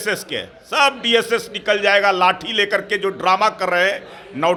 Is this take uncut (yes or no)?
yes